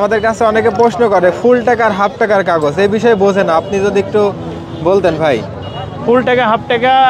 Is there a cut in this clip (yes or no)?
no